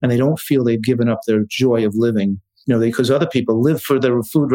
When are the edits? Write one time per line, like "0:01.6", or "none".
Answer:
0:02.5